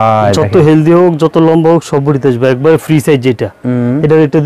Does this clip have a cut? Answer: no; 0 cuts

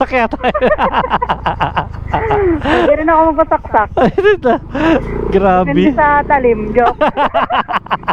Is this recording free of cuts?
yes; 0 cuts

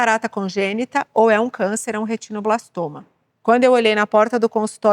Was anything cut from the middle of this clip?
yes; 1 cut; at 3.2 s

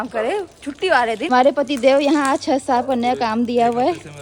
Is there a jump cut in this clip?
yes; 1 cut; at 1.3 s

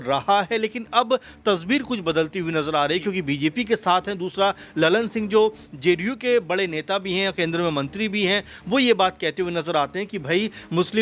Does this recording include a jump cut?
no; 0 cuts

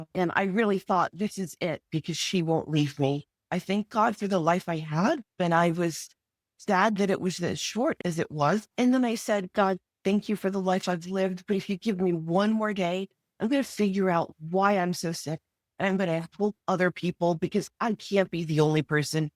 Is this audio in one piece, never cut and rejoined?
no; 3 cuts; at 3.4 s, 5.3 s, 8.7 s

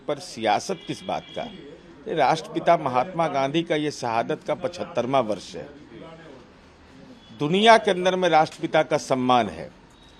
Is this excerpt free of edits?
yes; 0 cuts

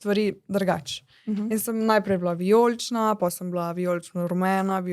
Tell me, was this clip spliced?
no; 0 cuts

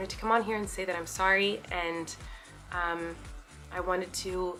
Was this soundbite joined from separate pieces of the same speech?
no; 0 cuts

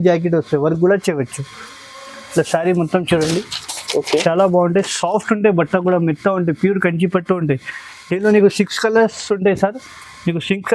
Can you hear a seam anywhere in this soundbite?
no; 0 cuts

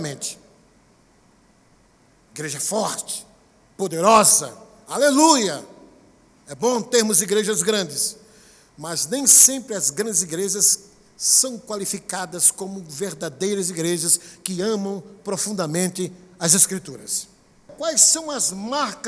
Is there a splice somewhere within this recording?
yes; 1 cut; at 17.7 s

